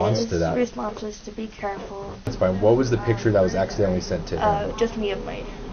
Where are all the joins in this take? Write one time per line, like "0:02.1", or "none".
0:02.3